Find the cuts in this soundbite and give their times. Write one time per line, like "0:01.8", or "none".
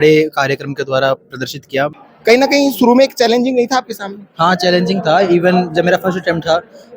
0:02.1